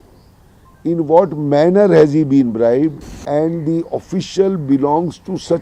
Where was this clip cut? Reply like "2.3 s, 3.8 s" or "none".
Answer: 3.1 s